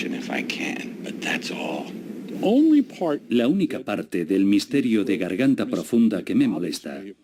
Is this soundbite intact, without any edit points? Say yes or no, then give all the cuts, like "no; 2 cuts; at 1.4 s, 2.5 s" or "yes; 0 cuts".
yes; 0 cuts